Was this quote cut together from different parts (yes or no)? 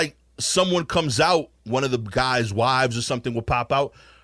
yes